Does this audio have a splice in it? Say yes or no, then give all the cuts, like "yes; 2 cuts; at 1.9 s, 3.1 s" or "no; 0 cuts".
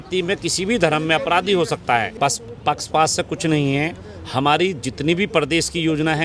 yes; 1 cut; at 2.1 s